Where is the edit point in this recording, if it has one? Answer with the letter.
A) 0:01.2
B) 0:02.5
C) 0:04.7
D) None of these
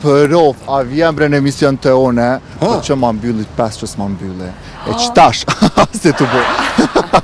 D